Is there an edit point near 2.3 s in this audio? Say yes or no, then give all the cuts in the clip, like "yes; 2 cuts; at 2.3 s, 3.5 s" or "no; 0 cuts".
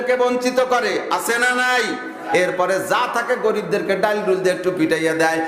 yes; 1 cut; at 2.3 s